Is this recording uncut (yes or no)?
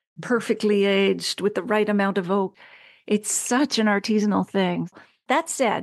no